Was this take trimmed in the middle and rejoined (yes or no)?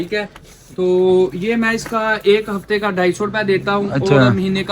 no